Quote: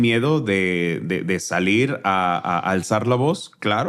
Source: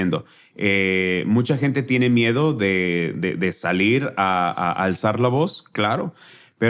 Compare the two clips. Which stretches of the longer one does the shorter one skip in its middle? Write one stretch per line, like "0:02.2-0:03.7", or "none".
none